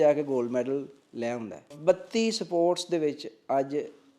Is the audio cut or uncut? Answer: cut